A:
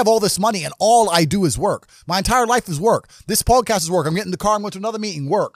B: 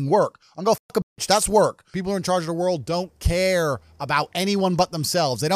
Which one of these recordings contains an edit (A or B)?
B